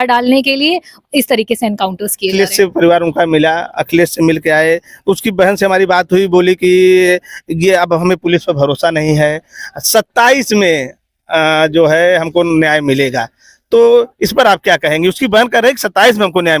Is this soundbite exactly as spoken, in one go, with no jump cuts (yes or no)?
no